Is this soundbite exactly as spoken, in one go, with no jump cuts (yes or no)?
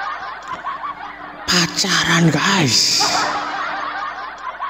yes